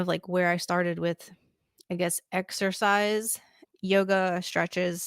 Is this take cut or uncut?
cut